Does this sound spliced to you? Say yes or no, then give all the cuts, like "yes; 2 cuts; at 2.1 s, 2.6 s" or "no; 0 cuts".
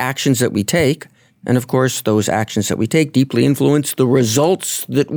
no; 0 cuts